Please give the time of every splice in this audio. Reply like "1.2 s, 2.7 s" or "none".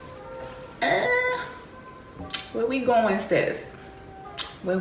none